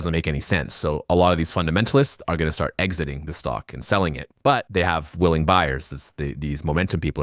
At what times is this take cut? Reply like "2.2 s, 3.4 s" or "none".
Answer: 4.5 s